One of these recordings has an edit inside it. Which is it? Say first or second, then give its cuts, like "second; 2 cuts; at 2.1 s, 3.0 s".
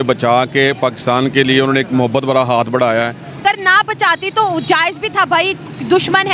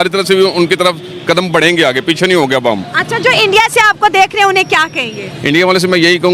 first; 1 cut; at 3.4 s